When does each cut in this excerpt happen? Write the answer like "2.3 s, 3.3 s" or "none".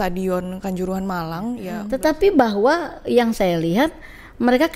1.7 s